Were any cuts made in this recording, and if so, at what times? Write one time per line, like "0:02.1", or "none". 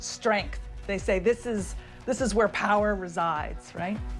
none